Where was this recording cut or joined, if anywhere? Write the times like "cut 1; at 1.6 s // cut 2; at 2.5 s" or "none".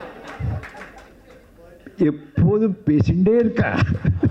none